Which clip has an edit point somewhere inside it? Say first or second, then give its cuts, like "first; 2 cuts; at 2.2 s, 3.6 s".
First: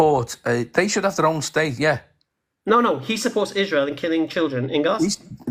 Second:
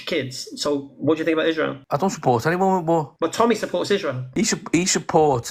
second; 3 cuts; at 1.8 s, 3.1 s, 4.2 s